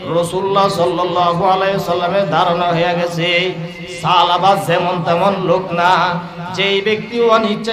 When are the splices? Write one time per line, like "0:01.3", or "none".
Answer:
none